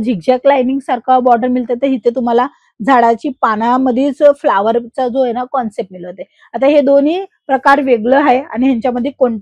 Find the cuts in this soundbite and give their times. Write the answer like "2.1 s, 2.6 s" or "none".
none